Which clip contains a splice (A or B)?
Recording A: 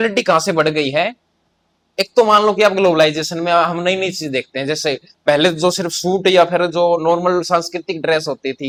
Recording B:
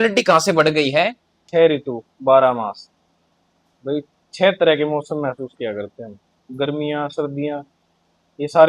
B